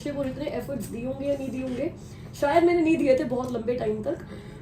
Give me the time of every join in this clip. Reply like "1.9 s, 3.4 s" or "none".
none